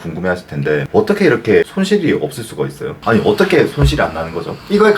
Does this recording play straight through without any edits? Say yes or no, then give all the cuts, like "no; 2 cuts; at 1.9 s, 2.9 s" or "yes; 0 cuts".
no; 1 cut; at 3.0 s